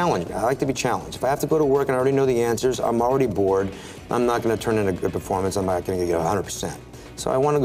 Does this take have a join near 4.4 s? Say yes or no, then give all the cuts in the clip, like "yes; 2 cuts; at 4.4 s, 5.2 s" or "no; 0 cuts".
no; 0 cuts